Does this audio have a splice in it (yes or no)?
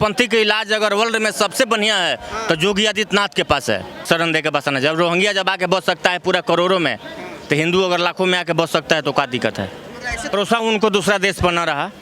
yes